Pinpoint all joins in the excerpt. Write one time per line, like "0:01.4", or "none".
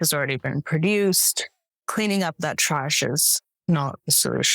0:01.6